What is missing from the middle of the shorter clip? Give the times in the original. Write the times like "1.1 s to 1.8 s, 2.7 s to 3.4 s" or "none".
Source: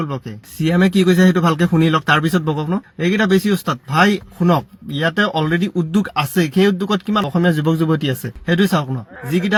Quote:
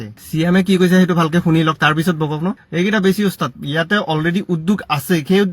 3.8 s to 4.8 s

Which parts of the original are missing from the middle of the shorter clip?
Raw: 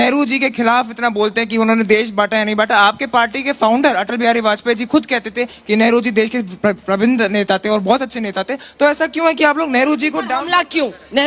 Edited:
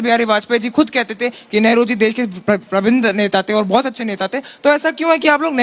none

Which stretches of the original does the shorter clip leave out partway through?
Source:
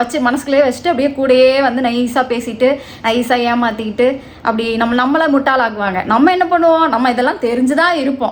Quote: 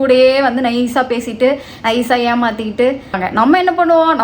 4.3 s to 5.8 s

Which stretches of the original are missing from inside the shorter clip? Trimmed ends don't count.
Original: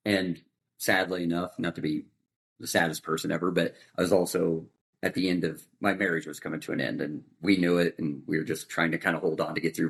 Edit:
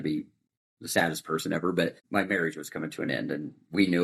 3.8 s to 5.7 s

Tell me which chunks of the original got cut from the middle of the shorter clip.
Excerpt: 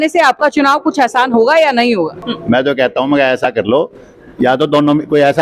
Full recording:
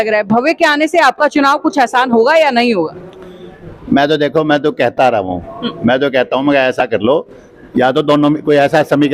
3.0 s to 5.6 s

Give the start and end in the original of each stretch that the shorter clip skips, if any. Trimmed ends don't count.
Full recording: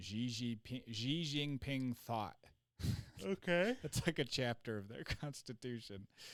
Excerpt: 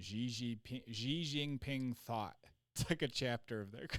2.7 s to 3.9 s

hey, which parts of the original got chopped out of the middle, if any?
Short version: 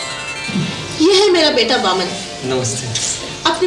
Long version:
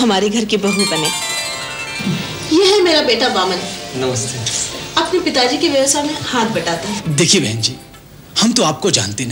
none

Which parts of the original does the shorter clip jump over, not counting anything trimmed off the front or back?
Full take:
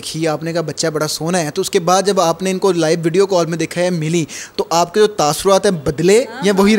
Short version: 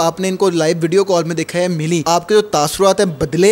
4.3 s to 4.7 s

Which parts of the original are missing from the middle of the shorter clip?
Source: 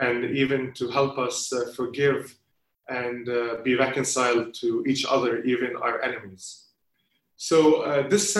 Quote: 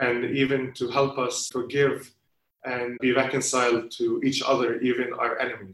1.5 s to 1.7 s, 3.2 s to 3.6 s

